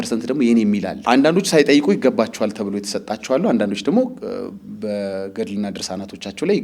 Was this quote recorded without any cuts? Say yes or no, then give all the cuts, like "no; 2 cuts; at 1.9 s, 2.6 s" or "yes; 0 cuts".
no; 1 cut; at 0.9 s